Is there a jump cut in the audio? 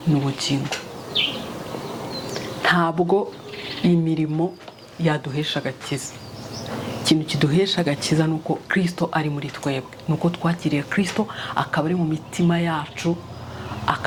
no; 0 cuts

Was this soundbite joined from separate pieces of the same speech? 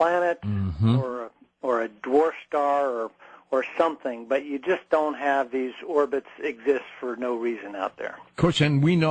no; 0 cuts

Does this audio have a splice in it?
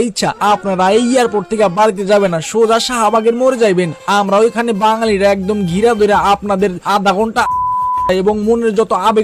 no; 0 cuts

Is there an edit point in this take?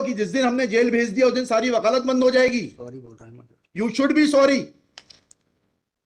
no; 0 cuts

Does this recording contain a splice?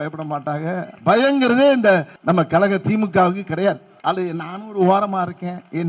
yes; 2 cuts; at 2.1 s, 3.9 s

